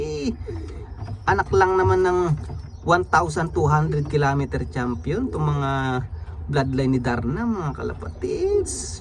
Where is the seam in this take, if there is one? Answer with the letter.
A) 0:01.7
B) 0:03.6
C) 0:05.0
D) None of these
D